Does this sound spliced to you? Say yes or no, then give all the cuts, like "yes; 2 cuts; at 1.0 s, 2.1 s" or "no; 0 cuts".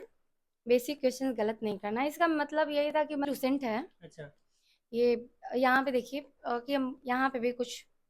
yes; 1 cut; at 3.3 s